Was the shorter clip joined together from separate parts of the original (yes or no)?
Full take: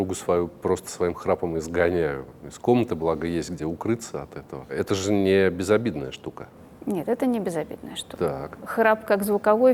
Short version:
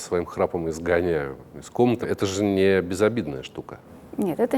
yes